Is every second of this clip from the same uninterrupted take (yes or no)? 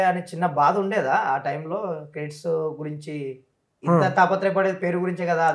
yes